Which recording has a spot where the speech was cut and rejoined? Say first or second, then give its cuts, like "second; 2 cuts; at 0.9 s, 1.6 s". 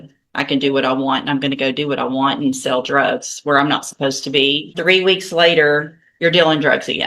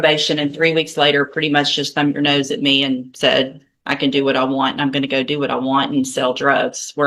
first; 1 cut; at 4.8 s